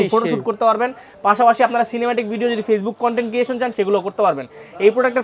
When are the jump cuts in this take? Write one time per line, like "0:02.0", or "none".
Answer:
none